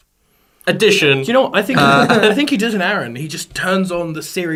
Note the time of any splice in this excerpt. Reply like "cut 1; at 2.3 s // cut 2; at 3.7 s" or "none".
none